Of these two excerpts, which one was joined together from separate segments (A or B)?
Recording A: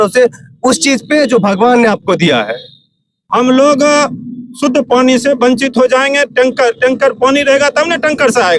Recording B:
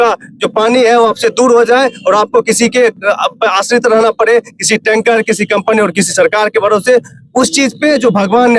A